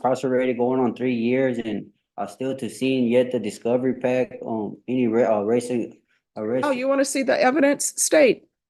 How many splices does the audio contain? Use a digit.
0